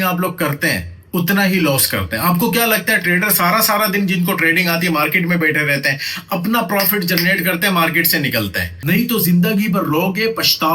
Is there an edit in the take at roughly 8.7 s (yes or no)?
yes